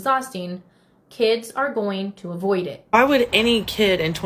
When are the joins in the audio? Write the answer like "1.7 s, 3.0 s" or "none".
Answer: 2.8 s